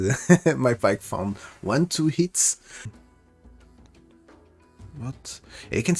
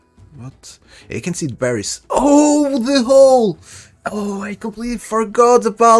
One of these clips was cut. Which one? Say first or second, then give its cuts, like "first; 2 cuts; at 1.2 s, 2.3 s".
first; 1 cut; at 2.9 s